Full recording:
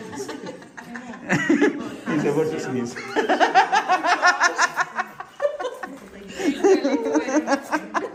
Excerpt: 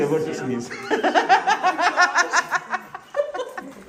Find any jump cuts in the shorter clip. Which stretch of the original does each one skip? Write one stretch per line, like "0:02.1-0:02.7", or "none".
none